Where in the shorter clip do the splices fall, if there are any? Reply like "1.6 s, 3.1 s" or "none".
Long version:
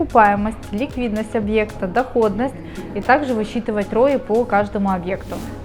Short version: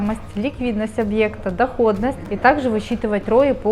2.3 s